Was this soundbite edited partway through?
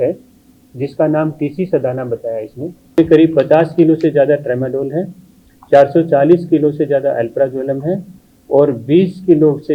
yes; 1 cut; at 3.0 s

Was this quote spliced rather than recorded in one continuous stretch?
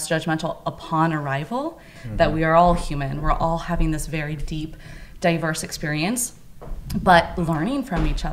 yes; 1 cut; at 2.0 s

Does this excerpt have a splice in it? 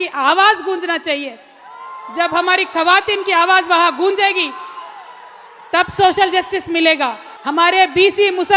yes; 1 cut; at 7.3 s

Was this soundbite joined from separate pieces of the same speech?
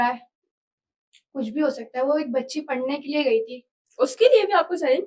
no; 0 cuts

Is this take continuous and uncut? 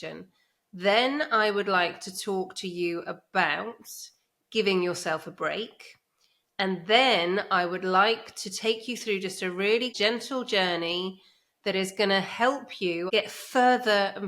no; 2 cuts; at 9.9 s, 13.1 s

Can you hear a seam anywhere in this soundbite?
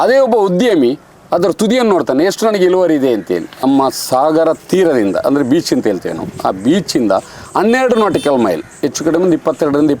yes; 1 cut; at 3.5 s

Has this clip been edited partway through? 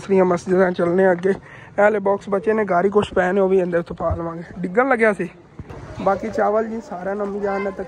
no; 0 cuts

